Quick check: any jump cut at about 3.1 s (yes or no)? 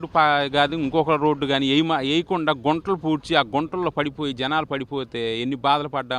no